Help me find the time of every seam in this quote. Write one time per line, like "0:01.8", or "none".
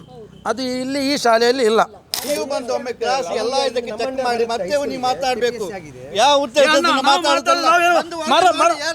0:02.2